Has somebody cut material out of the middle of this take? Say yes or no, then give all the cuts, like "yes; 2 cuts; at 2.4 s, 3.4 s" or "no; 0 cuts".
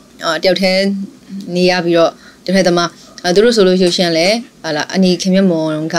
no; 0 cuts